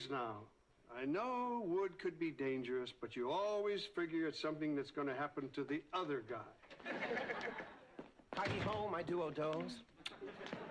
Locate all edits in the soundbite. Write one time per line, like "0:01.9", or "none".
0:03.9